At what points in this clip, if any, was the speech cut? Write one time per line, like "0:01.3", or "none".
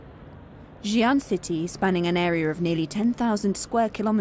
0:01.4